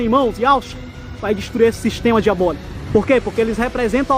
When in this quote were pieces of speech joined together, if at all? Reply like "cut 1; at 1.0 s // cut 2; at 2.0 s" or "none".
cut 1; at 2.7 s